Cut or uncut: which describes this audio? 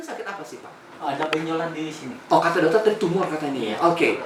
uncut